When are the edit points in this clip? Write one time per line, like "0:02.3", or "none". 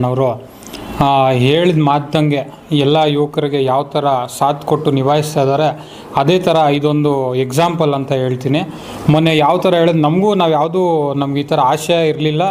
none